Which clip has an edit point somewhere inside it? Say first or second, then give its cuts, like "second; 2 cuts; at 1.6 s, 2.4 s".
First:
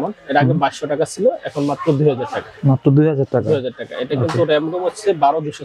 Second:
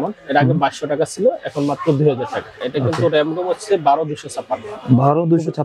second; 1 cut; at 2.5 s